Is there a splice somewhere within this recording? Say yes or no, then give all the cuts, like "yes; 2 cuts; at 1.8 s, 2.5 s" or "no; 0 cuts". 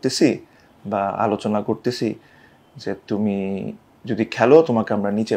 no; 0 cuts